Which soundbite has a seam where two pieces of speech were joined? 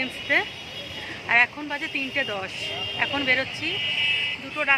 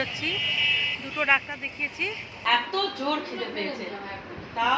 second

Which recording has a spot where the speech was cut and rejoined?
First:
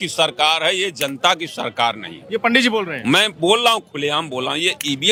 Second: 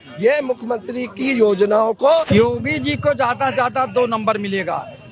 second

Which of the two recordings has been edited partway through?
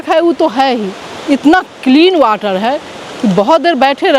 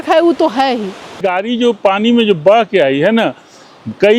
second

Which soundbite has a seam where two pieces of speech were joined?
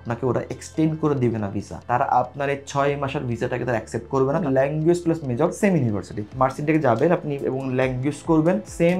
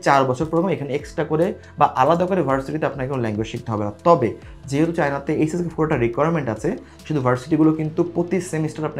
first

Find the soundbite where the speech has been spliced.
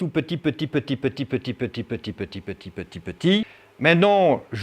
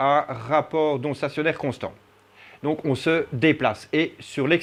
first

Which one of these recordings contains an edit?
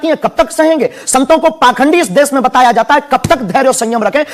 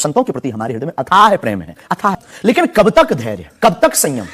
second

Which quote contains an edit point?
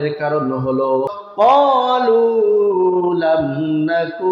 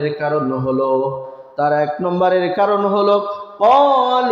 first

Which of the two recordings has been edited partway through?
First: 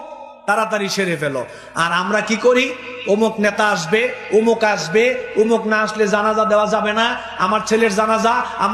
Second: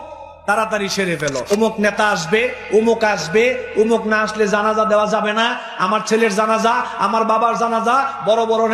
second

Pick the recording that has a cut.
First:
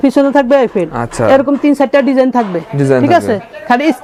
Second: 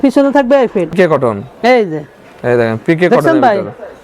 second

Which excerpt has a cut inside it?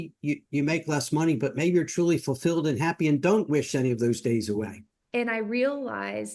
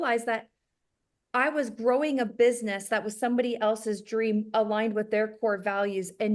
first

